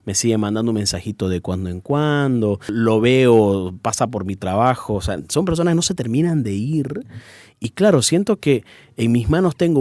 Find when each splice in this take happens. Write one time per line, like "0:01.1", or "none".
0:02.7